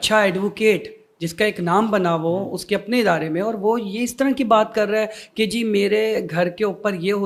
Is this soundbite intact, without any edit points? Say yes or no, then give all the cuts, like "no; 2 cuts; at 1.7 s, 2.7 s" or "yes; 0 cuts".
yes; 0 cuts